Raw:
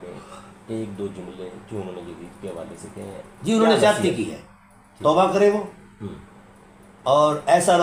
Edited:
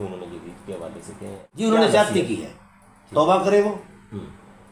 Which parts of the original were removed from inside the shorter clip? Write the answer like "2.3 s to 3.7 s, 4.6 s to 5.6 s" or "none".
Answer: 3.4 s to 3.5 s

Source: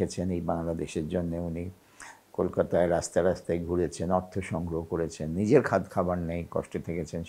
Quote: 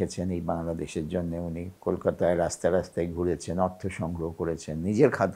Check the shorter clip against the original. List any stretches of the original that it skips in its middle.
1.7 s to 2.2 s

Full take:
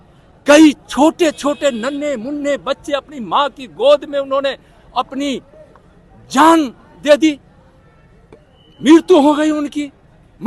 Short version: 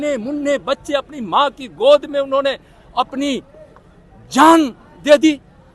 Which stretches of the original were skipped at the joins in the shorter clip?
none

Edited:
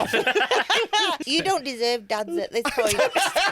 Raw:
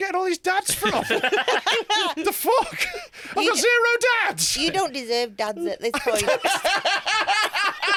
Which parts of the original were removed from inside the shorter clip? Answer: 2.2 s to 4.5 s

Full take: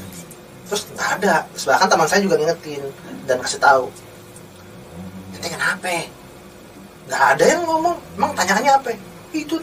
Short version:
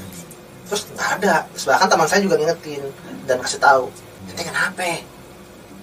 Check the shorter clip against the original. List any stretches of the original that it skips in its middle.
4.2 s to 5.2 s

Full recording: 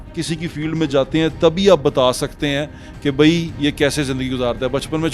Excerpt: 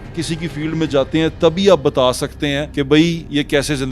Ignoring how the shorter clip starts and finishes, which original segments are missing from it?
2.7 s to 3.0 s

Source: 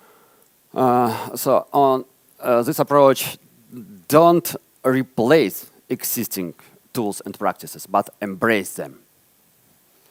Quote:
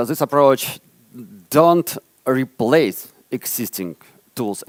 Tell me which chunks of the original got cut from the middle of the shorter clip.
none

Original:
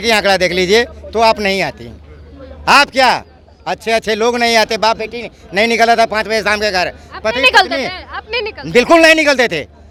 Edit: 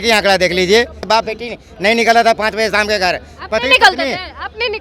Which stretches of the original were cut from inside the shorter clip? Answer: 1.0 s to 4.7 s

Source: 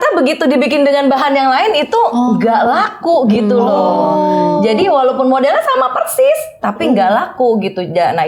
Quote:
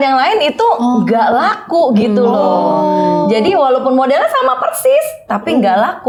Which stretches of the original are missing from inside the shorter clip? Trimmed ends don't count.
none

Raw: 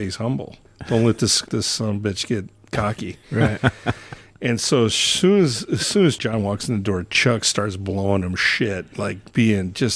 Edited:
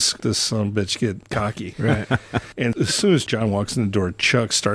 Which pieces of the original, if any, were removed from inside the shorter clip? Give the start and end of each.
2.7 s to 3.0 s, 4.2 s to 5.6 s

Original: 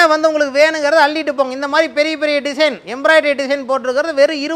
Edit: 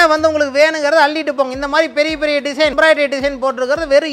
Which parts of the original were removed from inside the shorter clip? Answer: 2.7 s to 3.0 s

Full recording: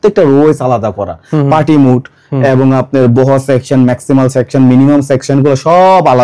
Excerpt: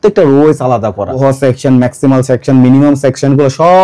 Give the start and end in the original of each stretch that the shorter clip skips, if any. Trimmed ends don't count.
1.2 s to 3.2 s

